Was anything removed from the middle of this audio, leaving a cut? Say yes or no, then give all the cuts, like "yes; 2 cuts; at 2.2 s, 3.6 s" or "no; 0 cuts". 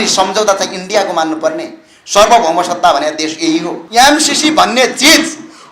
yes; 1 cut; at 3.8 s